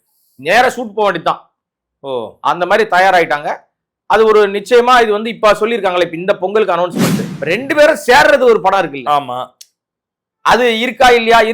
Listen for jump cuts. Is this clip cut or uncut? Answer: cut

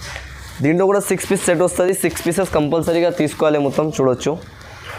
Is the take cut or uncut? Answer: uncut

